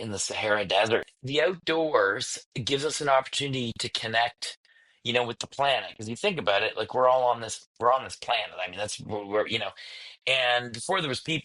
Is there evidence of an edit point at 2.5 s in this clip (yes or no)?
no